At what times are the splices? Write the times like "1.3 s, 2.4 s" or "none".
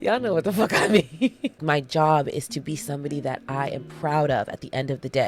1.6 s